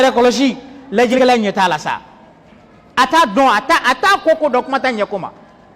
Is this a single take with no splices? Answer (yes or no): no